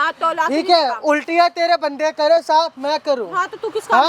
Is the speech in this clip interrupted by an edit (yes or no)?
no